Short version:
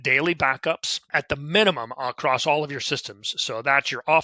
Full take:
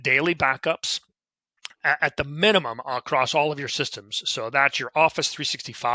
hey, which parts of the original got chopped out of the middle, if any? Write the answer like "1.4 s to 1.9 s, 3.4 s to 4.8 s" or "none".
1.1 s to 2.0 s